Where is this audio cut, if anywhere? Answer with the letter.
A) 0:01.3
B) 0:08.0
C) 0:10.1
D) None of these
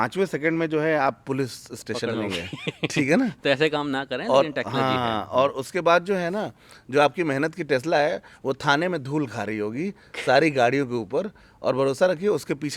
D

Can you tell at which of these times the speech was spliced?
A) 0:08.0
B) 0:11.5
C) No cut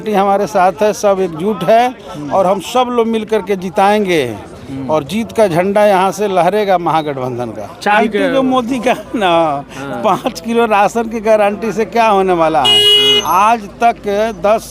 A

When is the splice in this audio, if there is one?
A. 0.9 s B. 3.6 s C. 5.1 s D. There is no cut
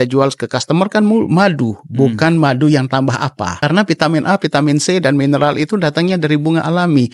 B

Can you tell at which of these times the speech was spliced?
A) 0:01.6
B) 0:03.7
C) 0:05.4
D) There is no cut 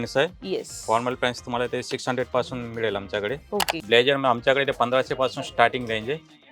B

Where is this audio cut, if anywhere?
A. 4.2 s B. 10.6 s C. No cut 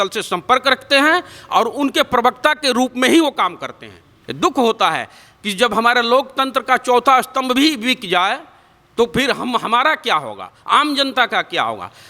C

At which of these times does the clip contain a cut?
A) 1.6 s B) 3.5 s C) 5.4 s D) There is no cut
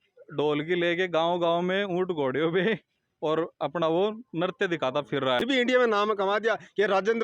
C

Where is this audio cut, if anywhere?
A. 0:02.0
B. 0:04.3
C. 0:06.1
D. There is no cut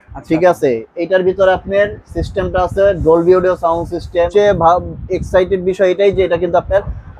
B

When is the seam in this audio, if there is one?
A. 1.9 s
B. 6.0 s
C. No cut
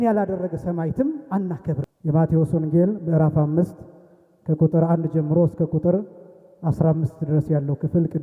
A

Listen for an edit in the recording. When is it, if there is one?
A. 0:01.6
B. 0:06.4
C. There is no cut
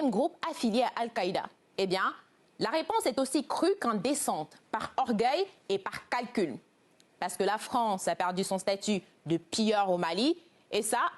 A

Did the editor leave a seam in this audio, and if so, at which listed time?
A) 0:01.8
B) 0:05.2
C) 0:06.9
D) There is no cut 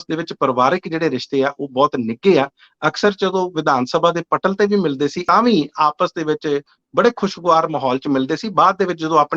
B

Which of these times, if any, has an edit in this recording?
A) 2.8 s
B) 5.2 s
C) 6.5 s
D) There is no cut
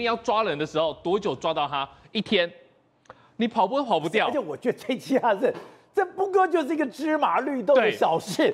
D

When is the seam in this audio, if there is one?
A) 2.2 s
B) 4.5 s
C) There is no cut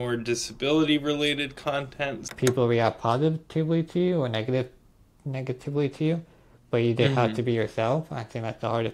A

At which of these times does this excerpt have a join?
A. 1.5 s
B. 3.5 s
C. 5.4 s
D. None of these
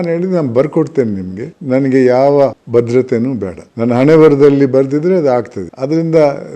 D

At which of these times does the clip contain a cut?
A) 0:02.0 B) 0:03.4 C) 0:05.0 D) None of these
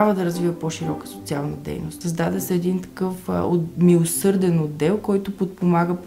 A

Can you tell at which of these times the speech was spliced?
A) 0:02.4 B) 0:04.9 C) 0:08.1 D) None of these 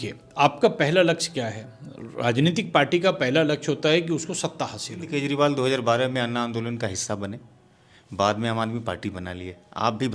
B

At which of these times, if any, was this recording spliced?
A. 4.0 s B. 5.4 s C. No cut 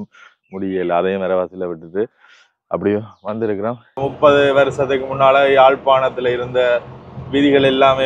A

